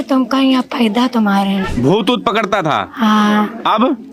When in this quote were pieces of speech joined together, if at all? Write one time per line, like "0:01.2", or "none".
none